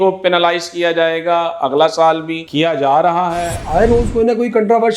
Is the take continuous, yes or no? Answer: no